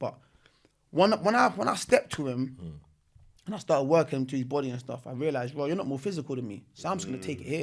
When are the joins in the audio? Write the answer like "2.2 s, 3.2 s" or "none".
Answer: none